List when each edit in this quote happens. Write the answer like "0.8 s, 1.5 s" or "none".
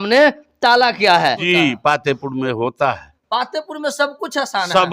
1.4 s